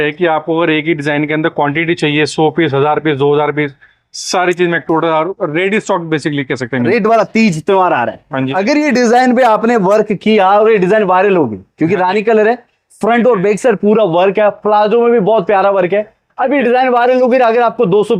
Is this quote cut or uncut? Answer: cut